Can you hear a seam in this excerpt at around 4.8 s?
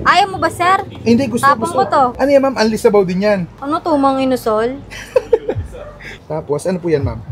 no; 0 cuts

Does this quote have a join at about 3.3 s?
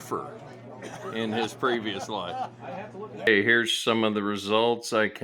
yes; 1 cut; at 3.3 s

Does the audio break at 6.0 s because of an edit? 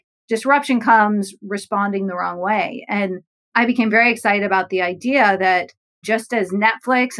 yes; 1 cut; at 6.0 s

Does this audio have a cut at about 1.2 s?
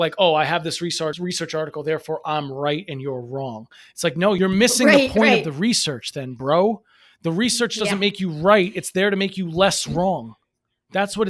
yes; 2 cuts; at 1.2 s, 4.4 s

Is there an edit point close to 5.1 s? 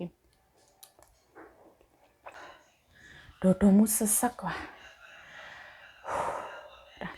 no; 1 cut; at 2.4 s

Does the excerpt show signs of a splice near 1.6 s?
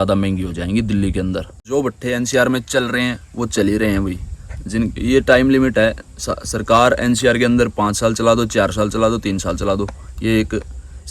yes; 1 cut; at 1.6 s

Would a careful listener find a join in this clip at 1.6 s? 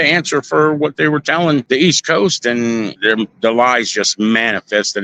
yes; 2 cuts; at 1.6 s, 2.9 s

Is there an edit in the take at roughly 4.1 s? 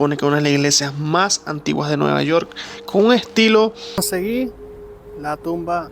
yes; 1 cut; at 4.1 s

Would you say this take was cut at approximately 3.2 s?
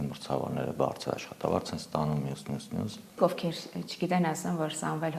yes; 1 cut; at 3.2 s

